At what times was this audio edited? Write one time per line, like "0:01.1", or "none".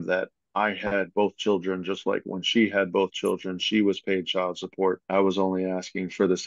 0:05.0